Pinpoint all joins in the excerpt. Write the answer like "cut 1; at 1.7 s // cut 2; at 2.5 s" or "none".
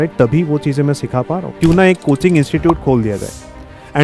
cut 1; at 1.5 s